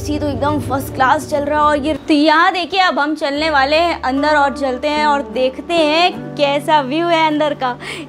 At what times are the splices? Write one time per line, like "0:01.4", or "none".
0:02.0